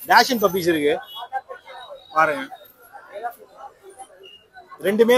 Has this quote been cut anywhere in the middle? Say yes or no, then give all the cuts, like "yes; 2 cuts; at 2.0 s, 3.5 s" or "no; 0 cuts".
no; 0 cuts